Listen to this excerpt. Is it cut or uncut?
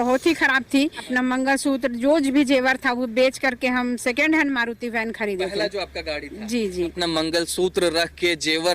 cut